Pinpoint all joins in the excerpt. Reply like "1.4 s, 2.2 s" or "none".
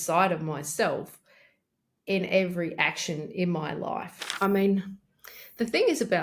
4.2 s